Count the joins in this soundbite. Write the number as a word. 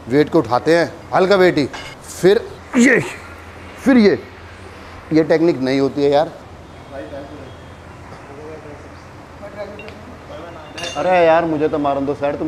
one